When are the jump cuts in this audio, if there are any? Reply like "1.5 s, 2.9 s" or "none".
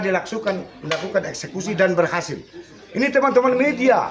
none

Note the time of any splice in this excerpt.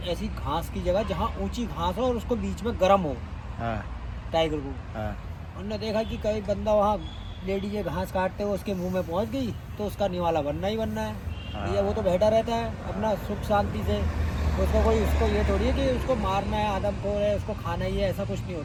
none

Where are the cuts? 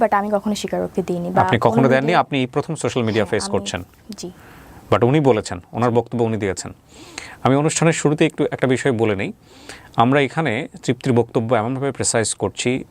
none

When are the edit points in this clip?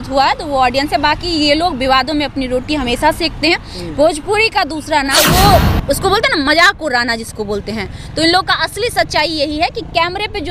5.2 s

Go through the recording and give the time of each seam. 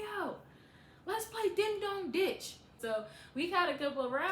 2.8 s

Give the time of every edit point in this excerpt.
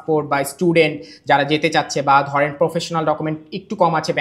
none

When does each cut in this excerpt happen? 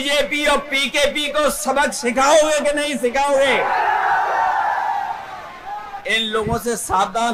none

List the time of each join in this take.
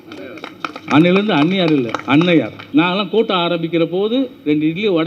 2.6 s

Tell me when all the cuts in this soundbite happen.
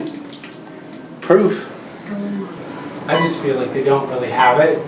2.6 s

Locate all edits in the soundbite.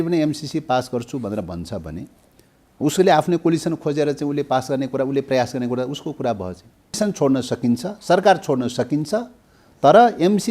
7.0 s

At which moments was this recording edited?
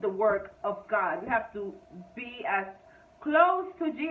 none

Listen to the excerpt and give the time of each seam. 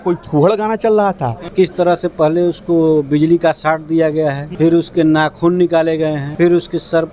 1.5 s, 4.4 s, 6.2 s

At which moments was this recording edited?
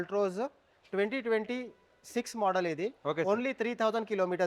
none

